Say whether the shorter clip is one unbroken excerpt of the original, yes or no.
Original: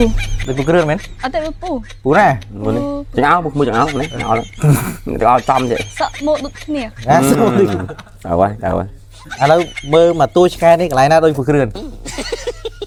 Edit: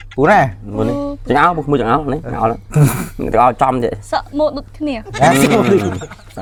yes